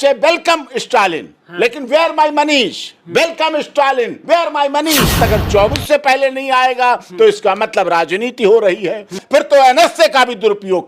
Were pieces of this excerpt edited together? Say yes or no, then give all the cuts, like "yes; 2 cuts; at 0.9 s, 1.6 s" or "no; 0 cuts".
yes; 2 cuts; at 5.2 s, 9.2 s